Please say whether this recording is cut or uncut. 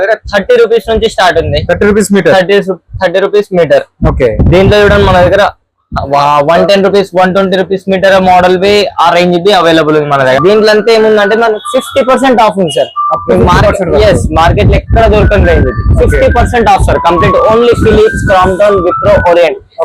cut